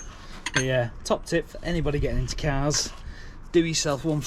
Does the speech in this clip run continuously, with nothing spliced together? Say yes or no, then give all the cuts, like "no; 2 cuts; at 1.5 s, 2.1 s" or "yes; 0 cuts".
yes; 0 cuts